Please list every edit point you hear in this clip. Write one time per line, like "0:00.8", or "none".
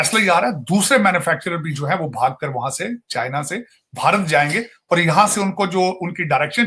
none